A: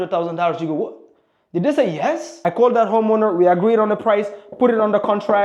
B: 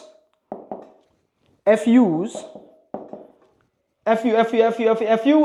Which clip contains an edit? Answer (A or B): A